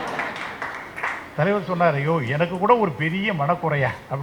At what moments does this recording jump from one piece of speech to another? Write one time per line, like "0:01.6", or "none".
none